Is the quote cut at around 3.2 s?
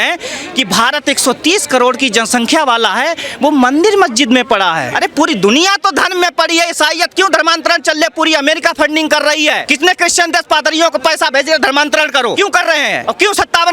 no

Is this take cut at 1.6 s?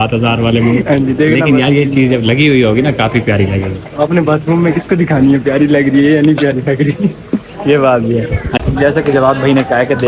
no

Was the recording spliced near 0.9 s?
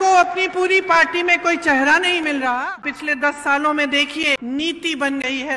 no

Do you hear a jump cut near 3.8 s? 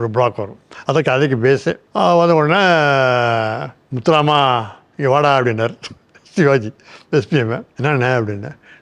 no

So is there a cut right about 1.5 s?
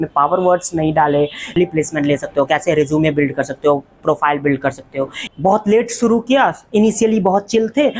yes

